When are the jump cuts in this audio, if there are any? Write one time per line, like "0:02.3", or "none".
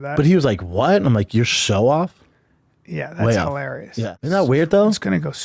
0:04.2